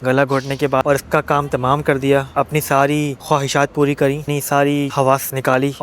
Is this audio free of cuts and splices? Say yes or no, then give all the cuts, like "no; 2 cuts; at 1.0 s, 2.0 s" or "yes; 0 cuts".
no; 3 cuts; at 0.8 s, 2.3 s, 4.2 s